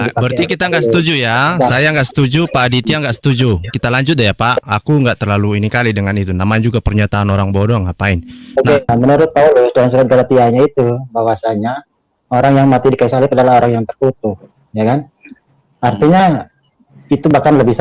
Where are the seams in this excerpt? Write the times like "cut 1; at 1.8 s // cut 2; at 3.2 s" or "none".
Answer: cut 1; at 8.8 s

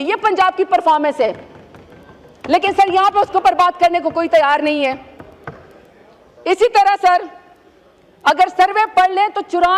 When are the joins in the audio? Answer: none

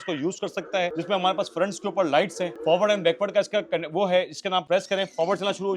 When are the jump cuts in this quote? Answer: cut 1; at 0.9 s // cut 2; at 2.5 s // cut 3; at 4.6 s

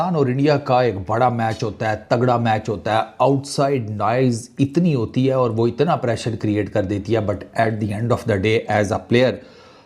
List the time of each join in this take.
none

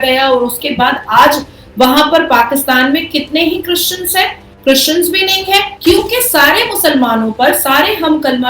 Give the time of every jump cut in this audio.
cut 1; at 5.7 s

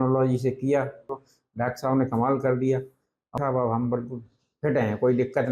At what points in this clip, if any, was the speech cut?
cut 1; at 1.1 s // cut 2; at 3.4 s

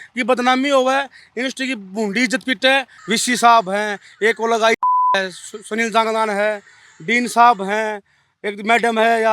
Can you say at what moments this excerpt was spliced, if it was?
cut 1; at 2.9 s

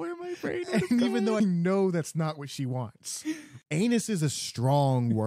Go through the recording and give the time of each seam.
cut 1; at 1.4 s // cut 2; at 3.5 s

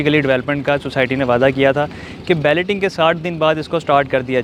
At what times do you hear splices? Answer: none

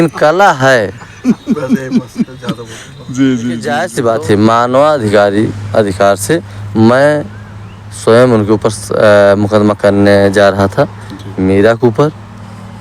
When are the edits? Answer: cut 1; at 3.8 s

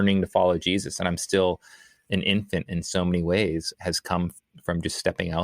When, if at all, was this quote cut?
none

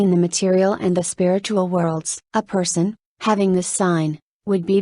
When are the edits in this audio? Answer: cut 1; at 2.2 s

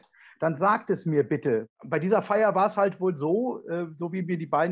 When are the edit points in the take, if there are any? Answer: cut 1; at 1.7 s

